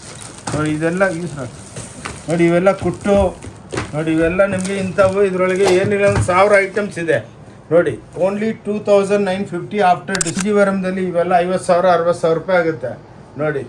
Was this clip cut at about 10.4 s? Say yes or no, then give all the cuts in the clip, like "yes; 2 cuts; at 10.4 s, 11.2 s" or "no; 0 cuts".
yes; 1 cut; at 10.4 s